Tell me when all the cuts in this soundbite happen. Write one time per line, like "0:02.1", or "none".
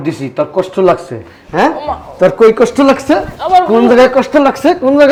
none